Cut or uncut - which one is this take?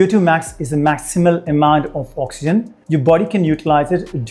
uncut